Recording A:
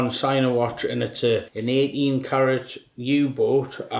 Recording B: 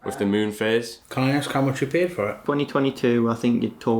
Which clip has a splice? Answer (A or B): B